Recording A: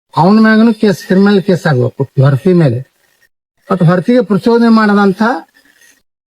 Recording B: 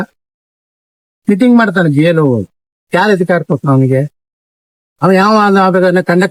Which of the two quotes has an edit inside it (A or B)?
A